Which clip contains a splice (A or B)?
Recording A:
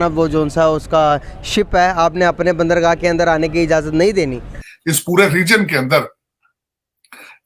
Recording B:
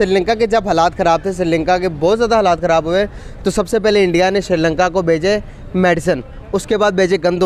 A